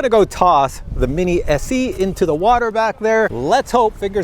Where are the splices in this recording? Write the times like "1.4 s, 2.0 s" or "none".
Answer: 3.4 s